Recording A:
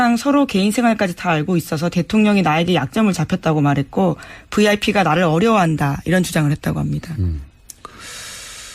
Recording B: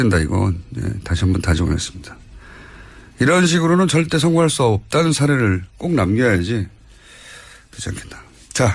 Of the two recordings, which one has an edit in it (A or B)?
B